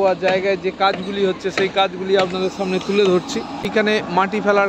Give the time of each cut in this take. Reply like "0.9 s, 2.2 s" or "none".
3.7 s